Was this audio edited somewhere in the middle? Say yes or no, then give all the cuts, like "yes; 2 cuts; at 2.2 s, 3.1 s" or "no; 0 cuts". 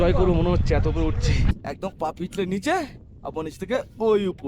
yes; 1 cut; at 1.7 s